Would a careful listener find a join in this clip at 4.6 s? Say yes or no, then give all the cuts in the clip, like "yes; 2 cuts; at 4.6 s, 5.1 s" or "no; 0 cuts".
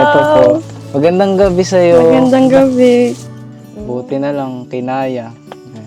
no; 1 cut; at 3.2 s